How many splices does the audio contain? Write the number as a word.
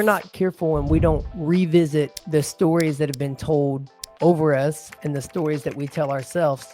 two